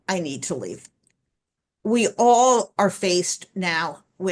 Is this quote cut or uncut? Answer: uncut